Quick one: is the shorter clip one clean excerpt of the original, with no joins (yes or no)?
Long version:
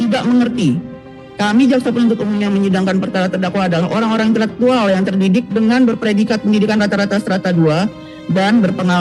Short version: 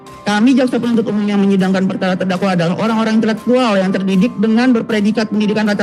yes